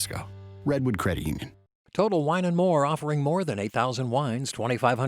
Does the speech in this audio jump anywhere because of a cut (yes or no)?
yes